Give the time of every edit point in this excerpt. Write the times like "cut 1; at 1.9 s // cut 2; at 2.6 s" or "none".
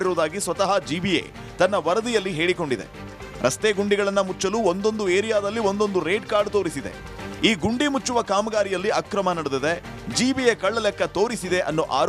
none

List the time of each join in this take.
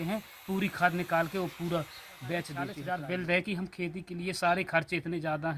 cut 1; at 2.8 s

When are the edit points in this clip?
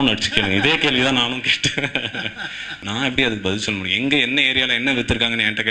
cut 1; at 2.7 s

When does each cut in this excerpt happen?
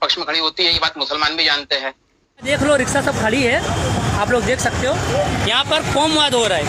cut 1; at 2.4 s

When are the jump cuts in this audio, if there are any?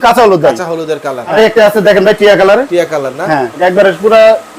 cut 1; at 1.3 s // cut 2; at 3.6 s

